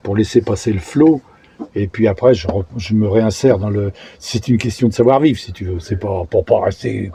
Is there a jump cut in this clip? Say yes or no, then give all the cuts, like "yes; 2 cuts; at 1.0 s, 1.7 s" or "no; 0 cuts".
no; 0 cuts